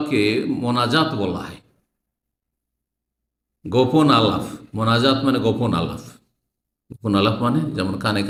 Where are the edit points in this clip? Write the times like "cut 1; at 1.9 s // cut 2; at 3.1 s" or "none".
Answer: none